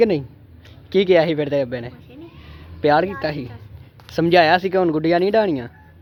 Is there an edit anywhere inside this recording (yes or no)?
no